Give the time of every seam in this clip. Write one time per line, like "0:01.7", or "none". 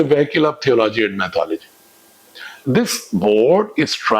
0:02.6